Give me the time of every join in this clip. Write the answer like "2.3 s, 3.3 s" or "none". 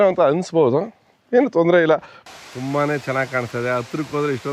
2.1 s

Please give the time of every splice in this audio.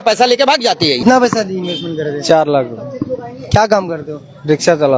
1.0 s

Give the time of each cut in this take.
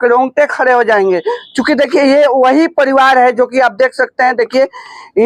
none

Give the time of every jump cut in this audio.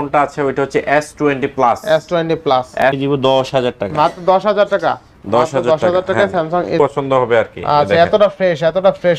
2.8 s, 6.7 s

